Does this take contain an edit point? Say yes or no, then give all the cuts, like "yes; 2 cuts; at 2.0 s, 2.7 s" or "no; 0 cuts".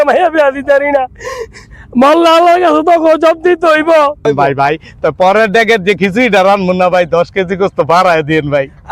yes; 1 cut; at 4.3 s